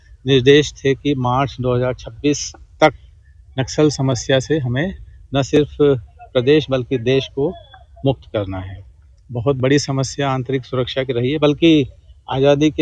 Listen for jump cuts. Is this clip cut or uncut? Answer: uncut